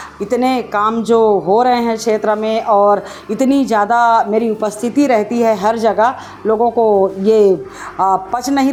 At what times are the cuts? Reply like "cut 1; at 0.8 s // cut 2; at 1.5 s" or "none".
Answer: none